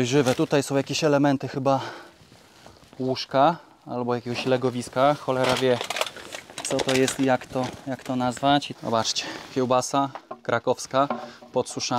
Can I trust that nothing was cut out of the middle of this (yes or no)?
no